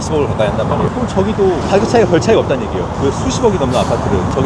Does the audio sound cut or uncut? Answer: uncut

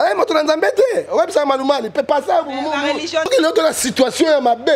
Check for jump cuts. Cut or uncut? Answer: cut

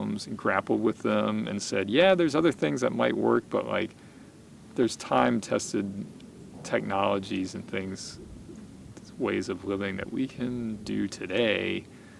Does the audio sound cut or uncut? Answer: uncut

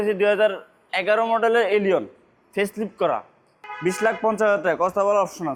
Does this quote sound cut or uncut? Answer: uncut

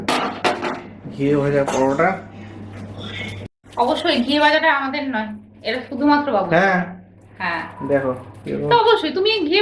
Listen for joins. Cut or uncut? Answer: uncut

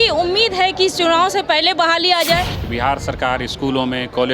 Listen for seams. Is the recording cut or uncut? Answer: cut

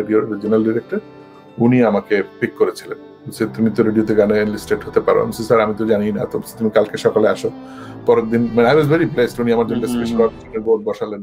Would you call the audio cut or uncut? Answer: uncut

